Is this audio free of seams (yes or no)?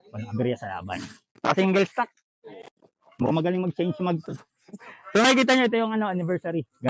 no